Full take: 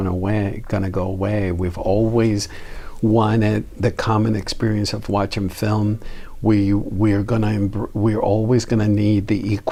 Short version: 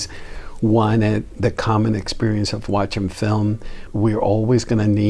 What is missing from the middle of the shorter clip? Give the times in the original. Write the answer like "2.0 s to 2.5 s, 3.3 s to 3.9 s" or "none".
6.2 s to 7.8 s